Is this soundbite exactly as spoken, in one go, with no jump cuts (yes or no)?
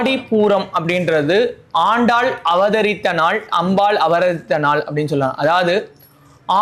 yes